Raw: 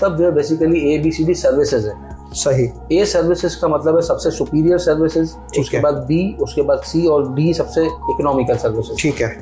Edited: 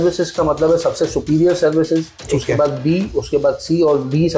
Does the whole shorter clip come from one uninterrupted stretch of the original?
yes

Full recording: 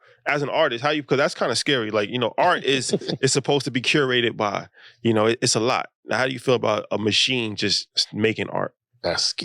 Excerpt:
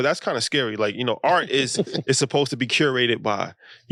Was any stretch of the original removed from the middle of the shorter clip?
no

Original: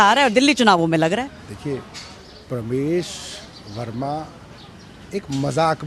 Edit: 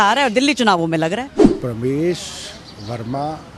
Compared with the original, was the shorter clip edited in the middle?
yes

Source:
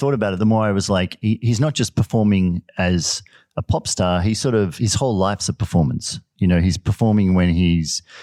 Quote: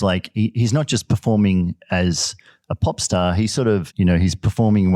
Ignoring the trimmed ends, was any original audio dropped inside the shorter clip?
yes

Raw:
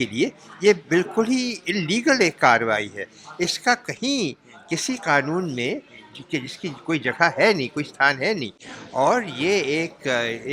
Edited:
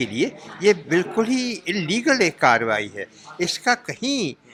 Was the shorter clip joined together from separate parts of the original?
no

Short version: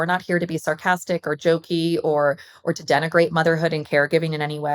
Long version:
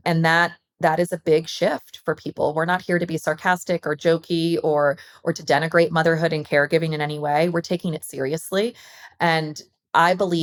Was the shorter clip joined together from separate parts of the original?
no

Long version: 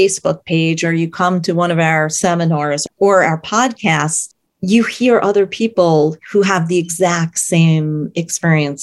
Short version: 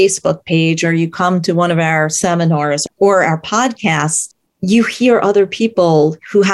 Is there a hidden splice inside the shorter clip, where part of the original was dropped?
no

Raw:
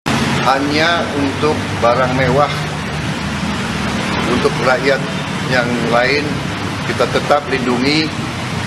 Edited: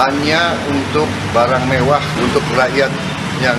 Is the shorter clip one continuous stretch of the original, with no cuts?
no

